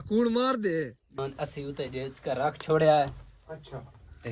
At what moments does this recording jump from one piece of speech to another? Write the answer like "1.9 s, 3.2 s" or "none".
1.2 s